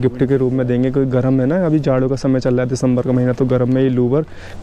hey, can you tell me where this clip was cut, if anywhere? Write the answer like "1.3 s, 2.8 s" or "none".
none